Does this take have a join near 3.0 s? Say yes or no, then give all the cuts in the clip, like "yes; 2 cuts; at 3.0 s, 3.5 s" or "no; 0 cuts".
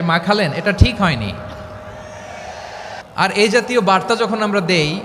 yes; 1 cut; at 3.0 s